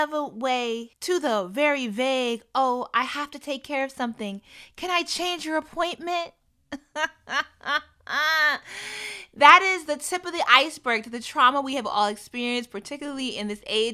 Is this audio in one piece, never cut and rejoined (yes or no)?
no